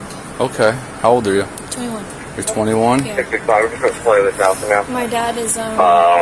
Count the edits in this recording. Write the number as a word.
zero